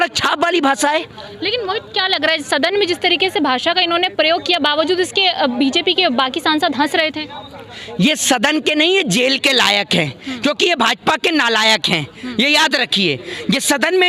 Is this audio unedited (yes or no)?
yes